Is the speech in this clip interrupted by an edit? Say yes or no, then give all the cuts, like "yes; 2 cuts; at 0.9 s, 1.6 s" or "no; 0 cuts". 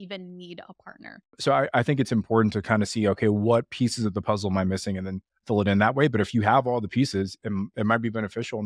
yes; 1 cut; at 1.4 s